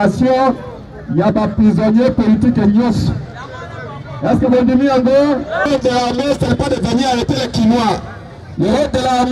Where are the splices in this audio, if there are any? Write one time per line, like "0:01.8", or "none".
0:05.7